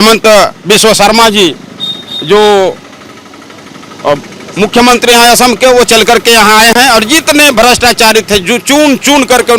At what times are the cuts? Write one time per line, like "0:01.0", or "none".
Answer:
none